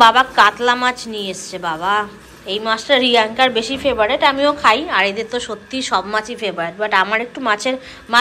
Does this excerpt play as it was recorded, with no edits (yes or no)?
yes